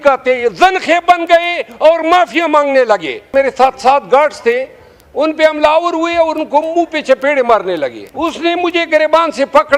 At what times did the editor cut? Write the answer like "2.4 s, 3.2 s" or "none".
3.3 s, 8.0 s